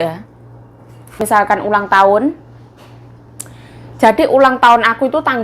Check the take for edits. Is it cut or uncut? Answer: cut